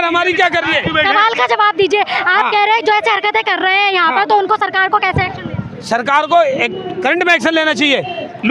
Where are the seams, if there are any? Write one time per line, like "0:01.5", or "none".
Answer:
none